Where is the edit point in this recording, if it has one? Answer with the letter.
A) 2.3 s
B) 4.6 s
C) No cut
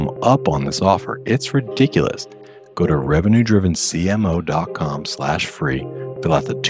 C